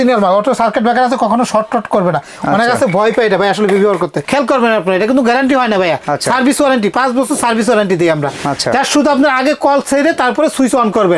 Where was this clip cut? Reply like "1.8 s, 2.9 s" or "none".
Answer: 4.2 s